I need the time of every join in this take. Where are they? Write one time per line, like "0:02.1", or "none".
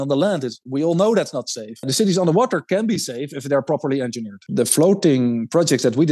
0:01.9
0:04.4